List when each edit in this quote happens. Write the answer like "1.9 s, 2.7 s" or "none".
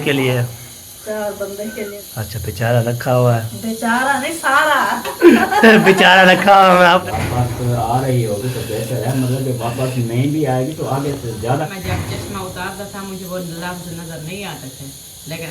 1.9 s, 7.0 s, 11.7 s